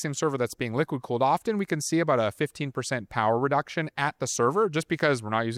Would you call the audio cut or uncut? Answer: uncut